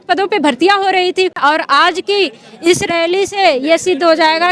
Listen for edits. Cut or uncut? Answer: cut